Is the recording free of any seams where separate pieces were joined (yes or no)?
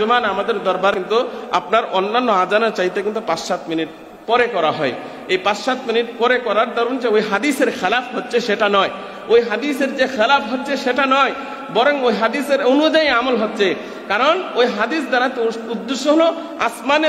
no